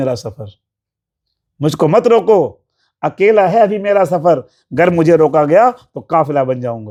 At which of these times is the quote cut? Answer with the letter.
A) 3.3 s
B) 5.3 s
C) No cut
C